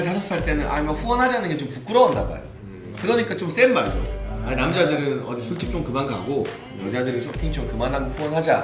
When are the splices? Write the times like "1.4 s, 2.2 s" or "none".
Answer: none